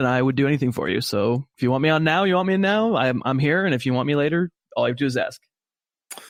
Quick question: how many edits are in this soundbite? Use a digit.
0